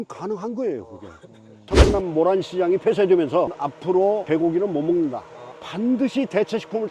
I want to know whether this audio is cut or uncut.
cut